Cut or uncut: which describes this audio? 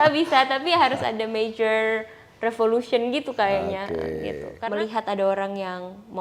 cut